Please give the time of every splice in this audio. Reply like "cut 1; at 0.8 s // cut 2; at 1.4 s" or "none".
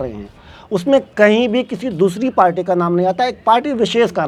none

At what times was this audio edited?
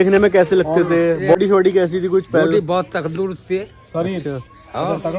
cut 1; at 1.3 s

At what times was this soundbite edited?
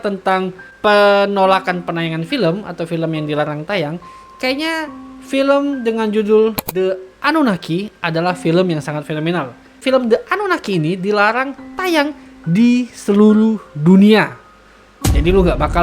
cut 1; at 9.8 s

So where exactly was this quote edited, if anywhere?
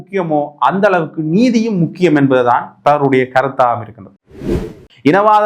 cut 1; at 4.5 s

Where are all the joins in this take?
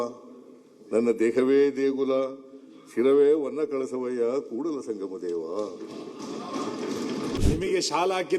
cut 1; at 7.4 s

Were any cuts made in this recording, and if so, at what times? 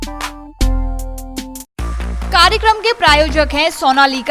none

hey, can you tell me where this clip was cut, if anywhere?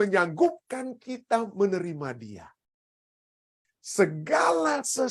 cut 1; at 3.2 s

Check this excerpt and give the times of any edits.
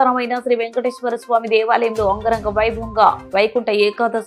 none

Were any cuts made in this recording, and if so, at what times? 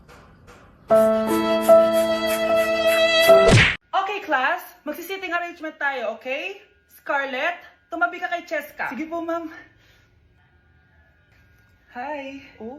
cut 1; at 3.8 s

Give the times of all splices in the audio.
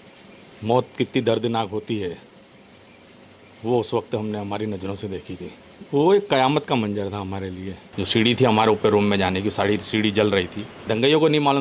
cut 1; at 5.7 s // cut 2; at 7.8 s // cut 3; at 10.7 s

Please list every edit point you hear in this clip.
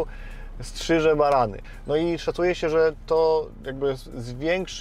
cut 1; at 1.7 s

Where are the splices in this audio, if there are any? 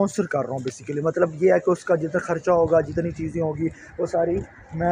none

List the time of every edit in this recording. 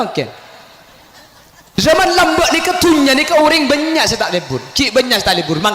cut 1; at 1.6 s

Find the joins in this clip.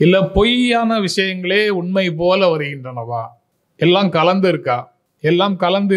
none

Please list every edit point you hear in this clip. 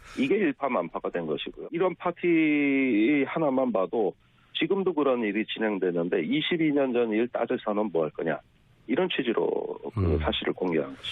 none

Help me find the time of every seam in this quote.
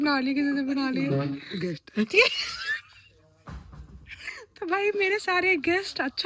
none

